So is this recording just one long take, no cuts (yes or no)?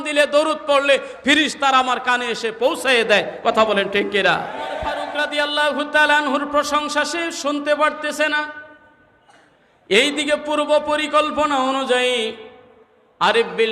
no